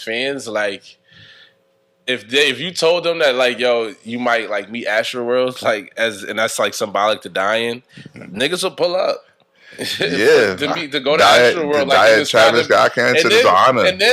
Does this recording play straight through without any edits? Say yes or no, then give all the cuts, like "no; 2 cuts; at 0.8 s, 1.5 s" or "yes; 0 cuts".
yes; 0 cuts